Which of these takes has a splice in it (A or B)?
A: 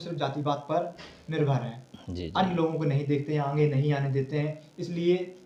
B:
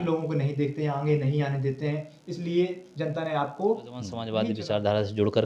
B